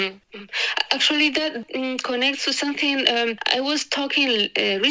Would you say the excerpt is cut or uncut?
cut